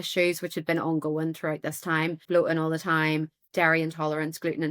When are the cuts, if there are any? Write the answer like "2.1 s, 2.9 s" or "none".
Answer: 2.2 s